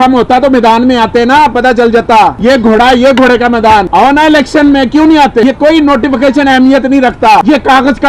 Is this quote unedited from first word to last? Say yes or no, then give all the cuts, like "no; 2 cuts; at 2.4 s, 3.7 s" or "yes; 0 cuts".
no; 3 cuts; at 2.4 s, 3.9 s, 5.4 s